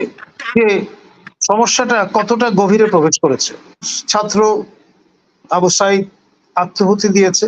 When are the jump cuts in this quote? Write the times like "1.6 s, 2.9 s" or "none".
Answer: 3.9 s